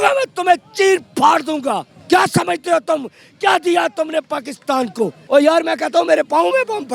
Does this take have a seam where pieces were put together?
yes; 2 cuts; at 1.9 s, 5.2 s

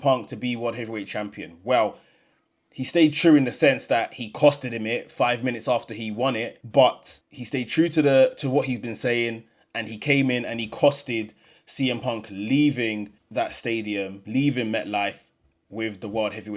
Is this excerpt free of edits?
no; 3 cuts; at 6.6 s, 13.2 s, 14.2 s

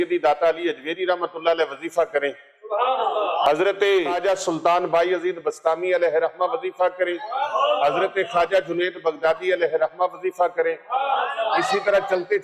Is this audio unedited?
no; 2 cuts; at 3.4 s, 4.2 s

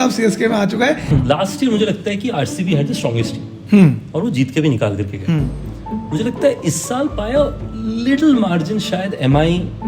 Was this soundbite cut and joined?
yes; 1 cut; at 1.1 s

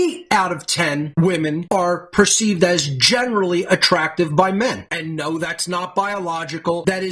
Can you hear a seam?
yes; 1 cut; at 4.8 s

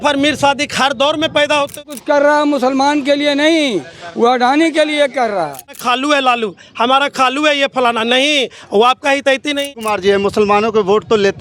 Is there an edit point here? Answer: yes; 3 cuts; at 1.8 s, 5.8 s, 9.7 s

